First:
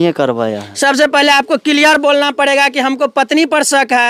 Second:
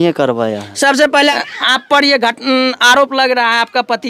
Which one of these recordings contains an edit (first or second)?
second